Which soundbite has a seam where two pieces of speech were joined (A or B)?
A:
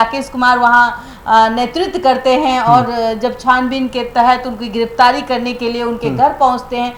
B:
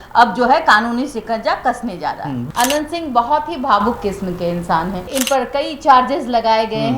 B